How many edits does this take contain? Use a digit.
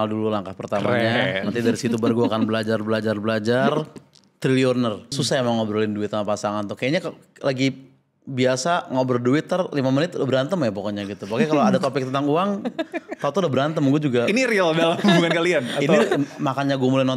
1